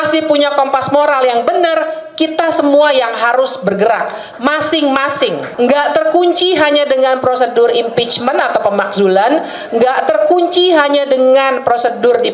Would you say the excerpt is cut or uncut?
cut